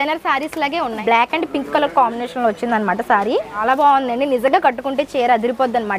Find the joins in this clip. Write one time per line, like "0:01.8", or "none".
0:01.0
0:03.6